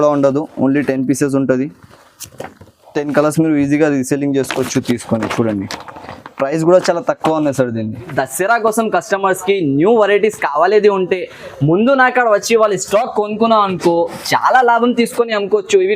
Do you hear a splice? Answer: yes; 1 cut; at 8.1 s

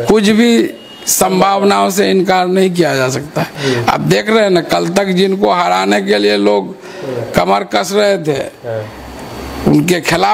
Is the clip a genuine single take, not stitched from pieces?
yes; 0 cuts

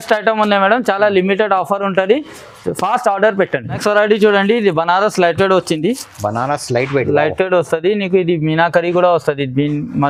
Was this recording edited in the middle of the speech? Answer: no; 0 cuts

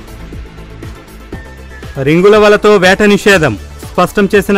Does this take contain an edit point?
yes; 2 cuts; at 1.1 s, 1.9 s

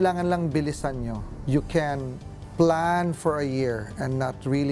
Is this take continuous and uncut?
no; 1 cut; at 1.3 s

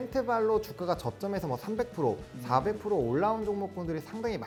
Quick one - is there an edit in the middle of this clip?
no; 0 cuts

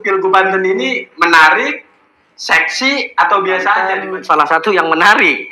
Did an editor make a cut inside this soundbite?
yes; 1 cut; at 3.9 s

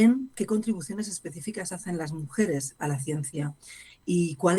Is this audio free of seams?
yes; 0 cuts

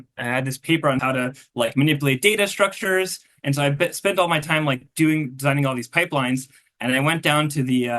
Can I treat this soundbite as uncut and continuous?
no; 1 cut; at 1.0 s

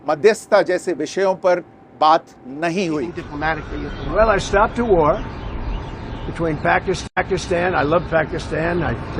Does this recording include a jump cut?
yes; 1 cut; at 3.2 s

